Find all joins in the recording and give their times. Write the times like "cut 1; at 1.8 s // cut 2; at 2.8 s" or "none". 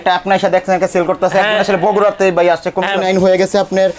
cut 1; at 3.0 s